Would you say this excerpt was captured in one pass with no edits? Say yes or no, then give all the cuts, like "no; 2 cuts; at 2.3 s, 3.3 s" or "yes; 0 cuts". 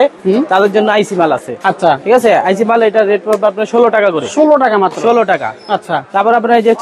yes; 0 cuts